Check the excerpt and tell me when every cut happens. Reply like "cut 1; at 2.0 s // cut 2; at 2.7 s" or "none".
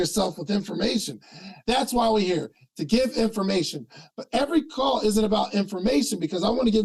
none